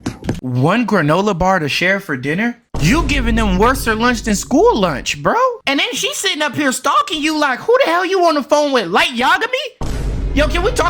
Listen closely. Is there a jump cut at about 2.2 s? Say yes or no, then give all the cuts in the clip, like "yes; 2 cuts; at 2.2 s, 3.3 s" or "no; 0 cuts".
no; 1 cut; at 5.6 s